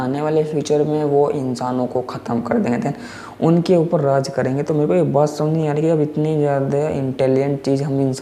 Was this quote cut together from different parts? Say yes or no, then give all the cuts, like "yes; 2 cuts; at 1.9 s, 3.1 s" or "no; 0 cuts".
no; 0 cuts